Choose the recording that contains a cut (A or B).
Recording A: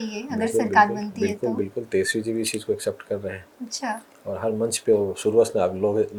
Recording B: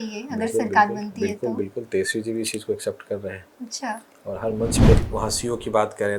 B